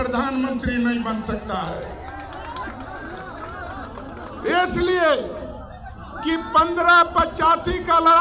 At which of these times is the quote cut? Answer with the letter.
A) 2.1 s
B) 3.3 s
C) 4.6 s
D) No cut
D